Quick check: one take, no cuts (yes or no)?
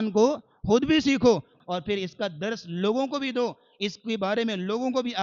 no